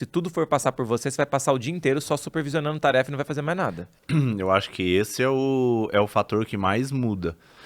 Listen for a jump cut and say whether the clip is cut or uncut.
cut